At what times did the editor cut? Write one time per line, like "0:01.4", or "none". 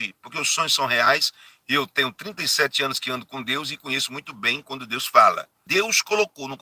0:05.6